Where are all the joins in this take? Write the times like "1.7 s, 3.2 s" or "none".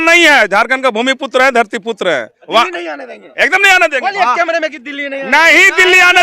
2.4 s